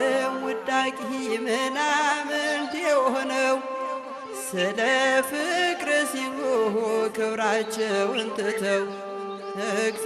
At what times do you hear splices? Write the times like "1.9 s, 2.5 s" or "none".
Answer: none